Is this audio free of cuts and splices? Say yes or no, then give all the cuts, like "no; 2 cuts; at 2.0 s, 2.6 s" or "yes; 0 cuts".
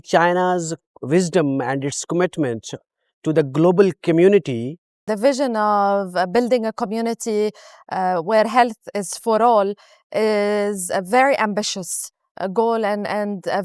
no; 1 cut; at 5.0 s